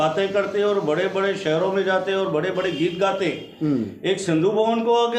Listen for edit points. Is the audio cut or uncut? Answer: uncut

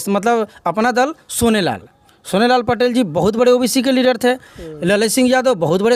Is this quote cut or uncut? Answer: uncut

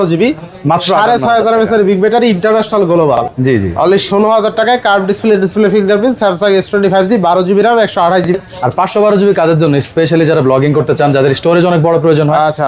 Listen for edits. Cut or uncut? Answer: cut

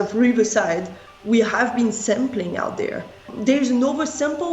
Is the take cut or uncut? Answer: cut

